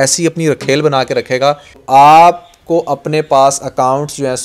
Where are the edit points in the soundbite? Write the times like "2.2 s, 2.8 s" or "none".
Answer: 1.8 s